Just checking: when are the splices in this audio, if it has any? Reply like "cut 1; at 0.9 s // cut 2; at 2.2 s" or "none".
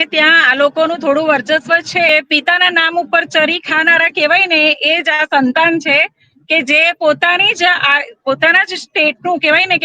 cut 1; at 2.1 s